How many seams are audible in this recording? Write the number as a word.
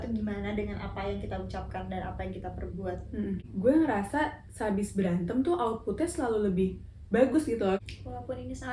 two